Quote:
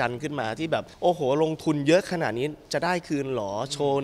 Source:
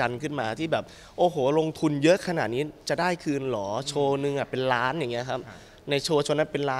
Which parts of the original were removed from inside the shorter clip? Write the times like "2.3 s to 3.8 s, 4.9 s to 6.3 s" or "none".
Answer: 0.9 s to 1.1 s